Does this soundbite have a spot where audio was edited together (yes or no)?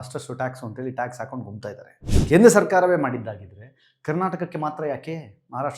yes